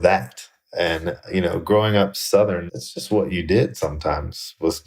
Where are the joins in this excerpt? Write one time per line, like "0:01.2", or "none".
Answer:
none